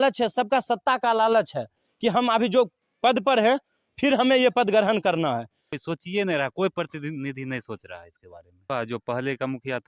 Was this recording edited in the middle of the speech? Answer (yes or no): yes